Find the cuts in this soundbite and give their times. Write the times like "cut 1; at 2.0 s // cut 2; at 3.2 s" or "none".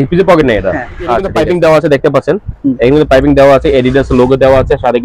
cut 1; at 1.3 s

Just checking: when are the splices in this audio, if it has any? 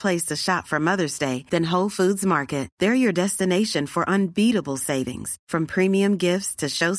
none

